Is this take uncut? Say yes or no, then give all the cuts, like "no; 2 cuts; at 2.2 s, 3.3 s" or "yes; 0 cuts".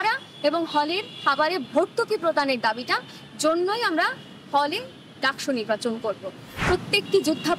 no; 1 cut; at 6.5 s